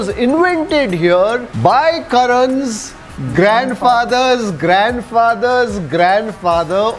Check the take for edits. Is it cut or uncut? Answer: uncut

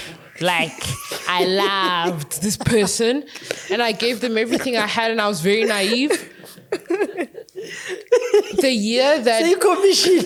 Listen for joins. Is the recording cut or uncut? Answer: uncut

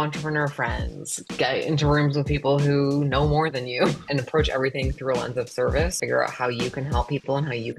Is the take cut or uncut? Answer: cut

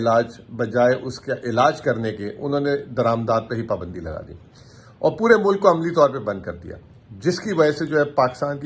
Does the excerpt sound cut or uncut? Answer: uncut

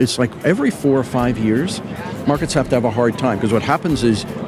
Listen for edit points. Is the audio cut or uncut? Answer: uncut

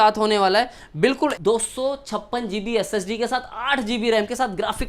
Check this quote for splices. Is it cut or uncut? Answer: cut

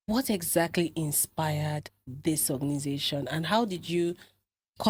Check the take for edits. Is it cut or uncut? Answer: uncut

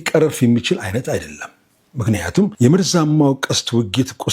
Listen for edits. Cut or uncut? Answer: cut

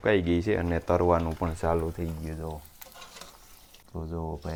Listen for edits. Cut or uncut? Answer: uncut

